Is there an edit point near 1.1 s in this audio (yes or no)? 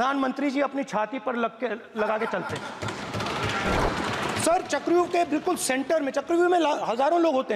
no